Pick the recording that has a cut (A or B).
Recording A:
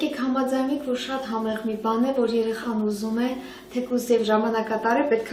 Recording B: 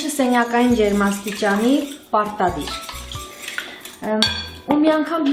A